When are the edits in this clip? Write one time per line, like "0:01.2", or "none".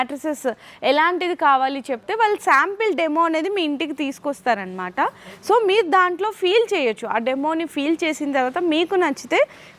none